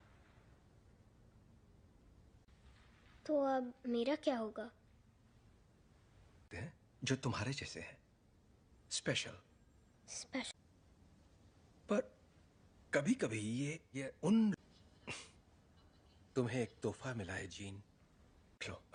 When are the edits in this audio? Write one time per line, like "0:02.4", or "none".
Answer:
none